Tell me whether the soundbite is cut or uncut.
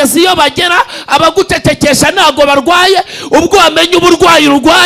uncut